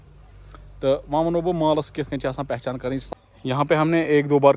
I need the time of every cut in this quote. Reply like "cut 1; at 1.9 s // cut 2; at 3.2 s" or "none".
cut 1; at 3.1 s